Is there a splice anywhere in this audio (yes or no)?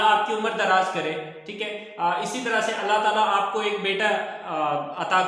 no